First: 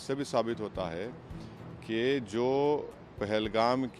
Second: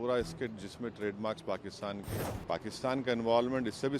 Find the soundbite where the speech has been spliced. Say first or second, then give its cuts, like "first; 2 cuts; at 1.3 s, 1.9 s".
second; 1 cut; at 2.1 s